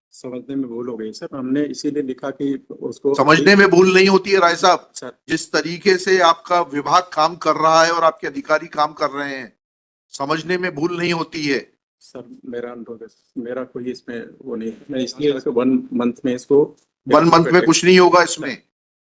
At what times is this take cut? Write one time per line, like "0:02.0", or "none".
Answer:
0:15.4